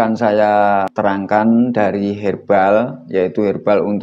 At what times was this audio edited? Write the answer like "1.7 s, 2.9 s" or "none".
0.9 s